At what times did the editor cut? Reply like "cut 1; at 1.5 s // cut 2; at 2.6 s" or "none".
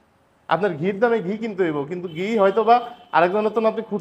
none